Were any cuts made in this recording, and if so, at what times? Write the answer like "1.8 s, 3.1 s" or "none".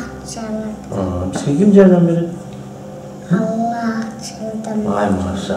none